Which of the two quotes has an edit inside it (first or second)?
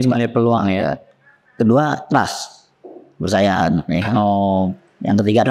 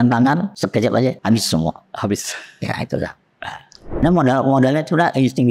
second